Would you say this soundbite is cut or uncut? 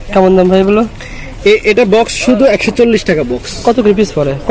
uncut